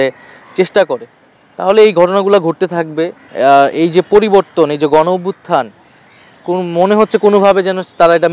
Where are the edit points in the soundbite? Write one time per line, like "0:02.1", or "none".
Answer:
0:03.2